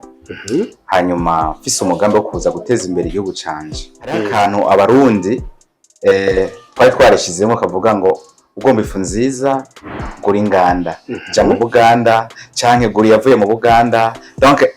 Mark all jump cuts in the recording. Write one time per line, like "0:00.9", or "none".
0:04.3

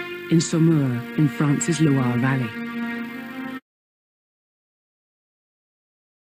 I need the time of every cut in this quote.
none

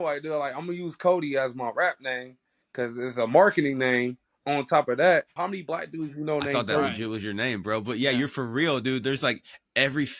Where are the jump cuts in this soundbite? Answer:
0:05.3

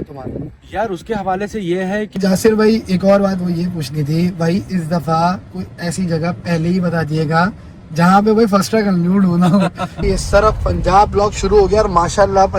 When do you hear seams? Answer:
0:02.1
0:10.0

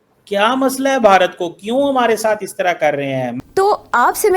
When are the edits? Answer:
0:03.4

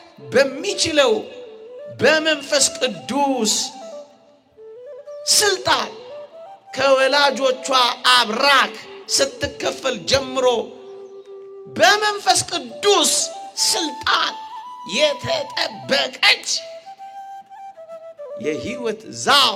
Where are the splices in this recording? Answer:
none

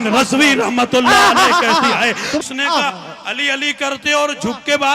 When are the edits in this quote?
0:02.4

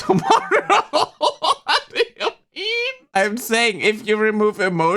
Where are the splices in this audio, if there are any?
0:03.0

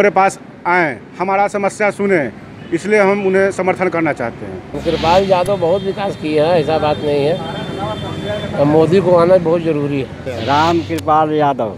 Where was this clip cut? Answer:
0:04.8
0:10.3

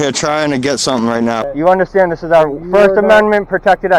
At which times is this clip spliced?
0:01.4

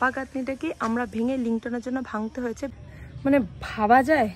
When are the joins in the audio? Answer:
0:02.7

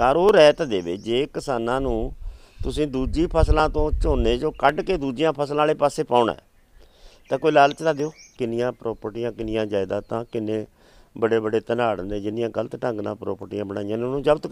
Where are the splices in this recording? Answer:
0:08.3

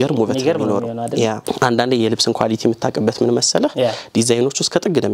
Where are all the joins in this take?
0:01.4

